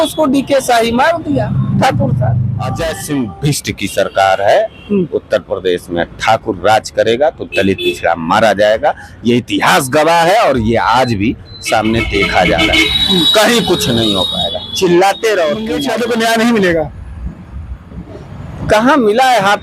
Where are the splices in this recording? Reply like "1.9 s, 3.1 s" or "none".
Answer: 2.8 s, 15.8 s